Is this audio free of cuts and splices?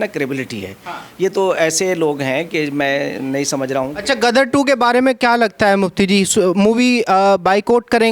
yes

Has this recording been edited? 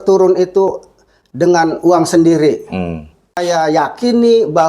yes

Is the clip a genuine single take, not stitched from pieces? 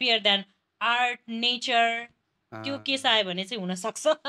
yes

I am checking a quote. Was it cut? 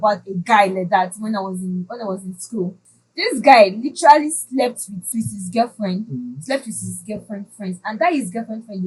no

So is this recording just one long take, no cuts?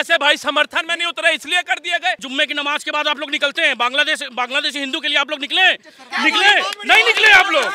no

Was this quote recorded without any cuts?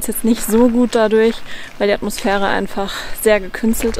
yes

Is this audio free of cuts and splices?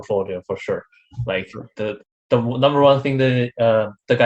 yes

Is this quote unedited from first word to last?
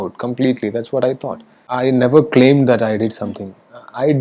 no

